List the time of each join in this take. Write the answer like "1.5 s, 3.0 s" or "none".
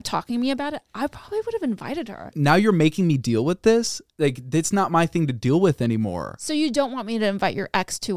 2.3 s